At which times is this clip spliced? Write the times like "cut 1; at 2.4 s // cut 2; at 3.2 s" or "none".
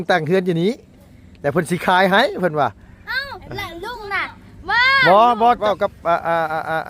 cut 1; at 5.6 s